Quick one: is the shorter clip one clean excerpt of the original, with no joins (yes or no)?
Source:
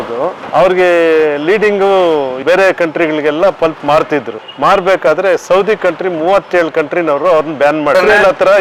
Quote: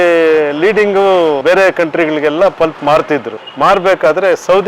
no